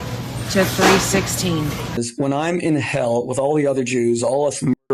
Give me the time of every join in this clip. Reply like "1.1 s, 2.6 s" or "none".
1.9 s